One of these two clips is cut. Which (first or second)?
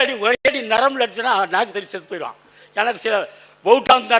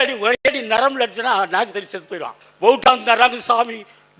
second